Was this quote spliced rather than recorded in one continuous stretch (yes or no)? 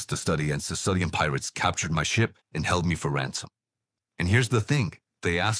yes